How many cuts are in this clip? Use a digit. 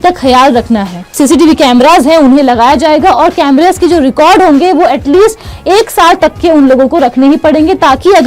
1